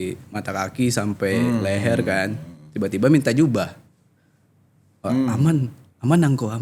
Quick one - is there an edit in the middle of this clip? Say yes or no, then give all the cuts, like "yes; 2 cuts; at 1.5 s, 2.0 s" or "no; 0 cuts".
no; 0 cuts